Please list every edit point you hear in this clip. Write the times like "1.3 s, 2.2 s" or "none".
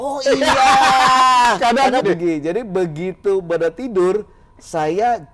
2.0 s